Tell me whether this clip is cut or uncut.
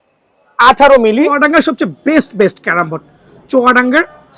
cut